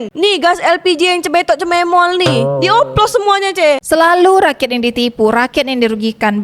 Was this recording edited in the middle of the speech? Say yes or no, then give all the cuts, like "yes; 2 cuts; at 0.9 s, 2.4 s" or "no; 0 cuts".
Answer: yes; 1 cut; at 3.8 s